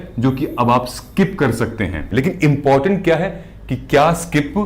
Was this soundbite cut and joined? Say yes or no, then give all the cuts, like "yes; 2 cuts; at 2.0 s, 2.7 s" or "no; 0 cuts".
yes; 1 cut; at 2.0 s